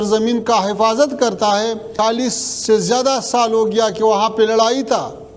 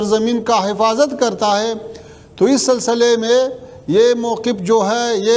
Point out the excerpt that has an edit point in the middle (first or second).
first